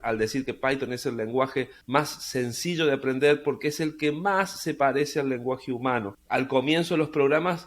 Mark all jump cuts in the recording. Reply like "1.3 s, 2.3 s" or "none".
1.8 s, 6.1 s